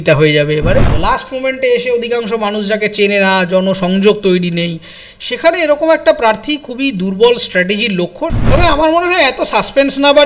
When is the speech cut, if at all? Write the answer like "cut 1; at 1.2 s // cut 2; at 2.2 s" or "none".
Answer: cut 1; at 0.9 s // cut 2; at 8.3 s